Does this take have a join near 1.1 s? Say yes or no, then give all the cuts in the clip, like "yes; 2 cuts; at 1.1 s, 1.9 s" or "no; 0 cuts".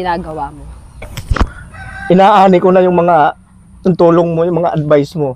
yes; 1 cut; at 1.1 s